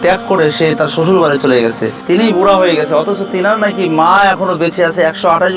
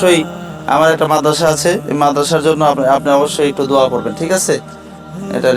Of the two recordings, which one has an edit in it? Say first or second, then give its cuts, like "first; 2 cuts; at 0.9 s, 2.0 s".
first; 1 cut; at 1.9 s